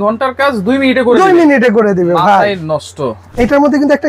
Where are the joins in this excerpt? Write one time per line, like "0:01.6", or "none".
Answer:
0:03.2